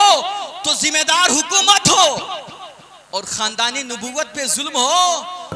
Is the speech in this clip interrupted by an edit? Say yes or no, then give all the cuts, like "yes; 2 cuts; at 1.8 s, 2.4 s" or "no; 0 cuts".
no; 0 cuts